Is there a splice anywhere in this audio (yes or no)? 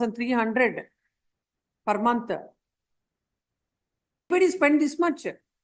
yes